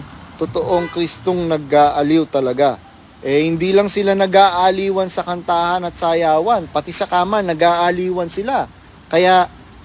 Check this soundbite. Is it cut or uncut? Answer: uncut